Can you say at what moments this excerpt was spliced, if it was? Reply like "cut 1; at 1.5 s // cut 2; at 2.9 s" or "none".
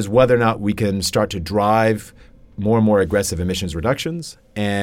none

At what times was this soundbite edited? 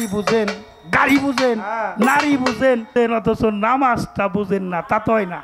cut 1; at 3.0 s

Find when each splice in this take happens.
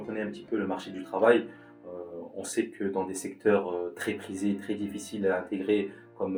none

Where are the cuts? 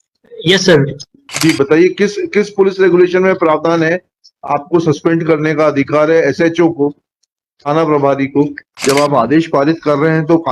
cut 1; at 1.2 s // cut 2; at 8.6 s

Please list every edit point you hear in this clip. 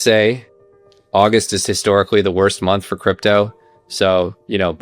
cut 1; at 3.8 s

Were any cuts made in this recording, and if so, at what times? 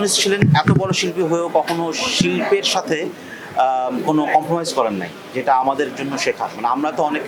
none

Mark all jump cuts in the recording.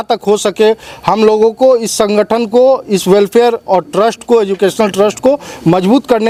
none

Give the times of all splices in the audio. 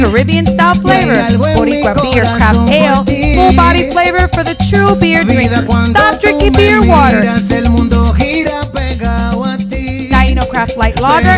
none

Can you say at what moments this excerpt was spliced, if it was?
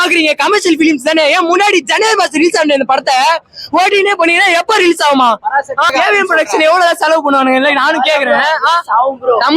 cut 1; at 5.9 s

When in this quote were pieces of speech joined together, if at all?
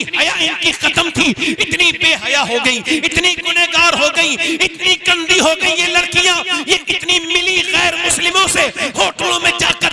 none

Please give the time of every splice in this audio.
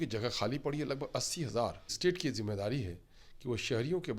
cut 1; at 1.9 s

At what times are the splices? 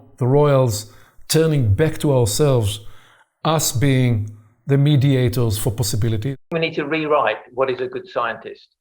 cut 1; at 6.4 s

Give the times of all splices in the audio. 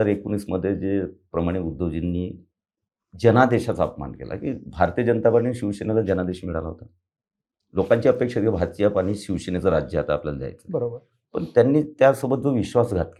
none

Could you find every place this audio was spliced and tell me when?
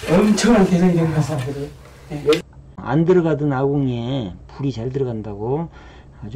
cut 1; at 2.8 s

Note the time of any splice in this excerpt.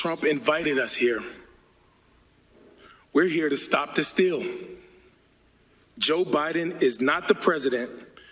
cut 1; at 2.0 s

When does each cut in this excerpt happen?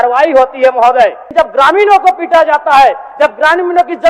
cut 1; at 1.2 s

